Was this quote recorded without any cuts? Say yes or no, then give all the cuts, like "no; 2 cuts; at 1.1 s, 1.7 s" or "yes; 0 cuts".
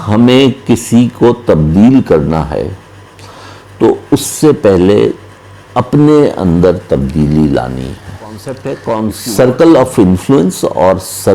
no; 1 cut; at 8.5 s